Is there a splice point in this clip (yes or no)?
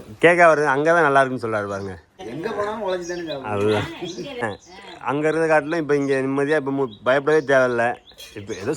yes